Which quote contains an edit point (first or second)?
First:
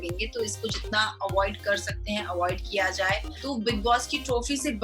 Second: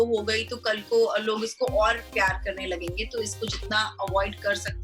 first